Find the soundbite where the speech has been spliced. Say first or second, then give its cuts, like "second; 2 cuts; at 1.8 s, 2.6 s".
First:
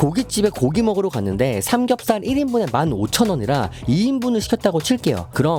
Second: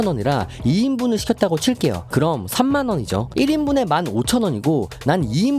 second; 1 cut; at 3.3 s